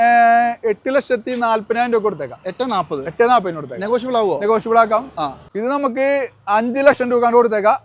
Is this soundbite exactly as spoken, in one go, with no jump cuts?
no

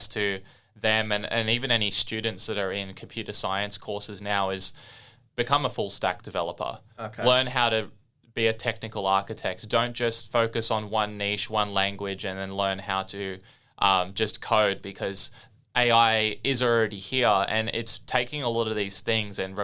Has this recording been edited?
no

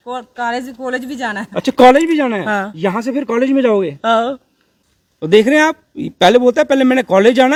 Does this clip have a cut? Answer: no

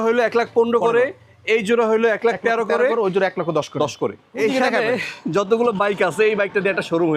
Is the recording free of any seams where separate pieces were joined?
yes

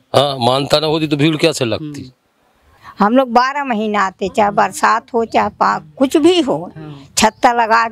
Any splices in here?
yes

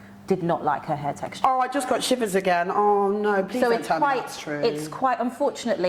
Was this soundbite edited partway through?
no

